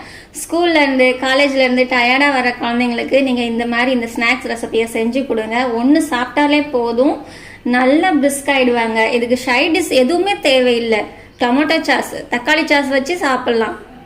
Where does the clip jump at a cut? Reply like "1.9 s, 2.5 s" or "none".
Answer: 11.2 s